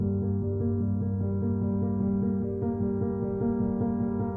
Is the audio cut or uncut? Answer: uncut